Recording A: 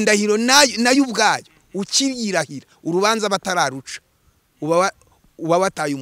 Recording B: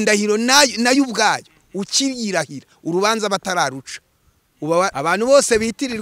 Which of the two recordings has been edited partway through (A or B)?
B